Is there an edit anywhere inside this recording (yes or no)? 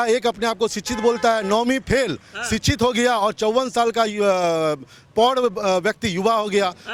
no